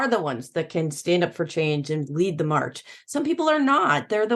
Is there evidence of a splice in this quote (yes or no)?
no